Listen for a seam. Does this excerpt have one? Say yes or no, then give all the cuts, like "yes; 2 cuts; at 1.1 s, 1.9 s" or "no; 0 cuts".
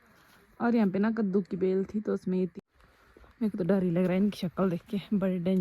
yes; 1 cut; at 2.5 s